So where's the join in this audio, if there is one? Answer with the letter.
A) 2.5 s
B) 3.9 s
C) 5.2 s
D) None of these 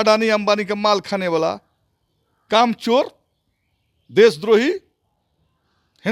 D